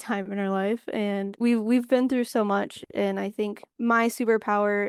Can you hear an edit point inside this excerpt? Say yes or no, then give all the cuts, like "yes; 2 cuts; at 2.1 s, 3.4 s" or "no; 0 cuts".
no; 0 cuts